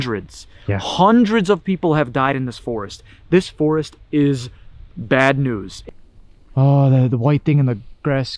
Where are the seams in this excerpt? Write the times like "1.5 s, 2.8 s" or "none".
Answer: 5.7 s